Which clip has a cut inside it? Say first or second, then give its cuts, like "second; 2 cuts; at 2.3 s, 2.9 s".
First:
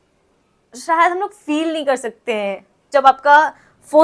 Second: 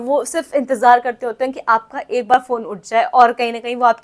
first; 1 cut; at 2.8 s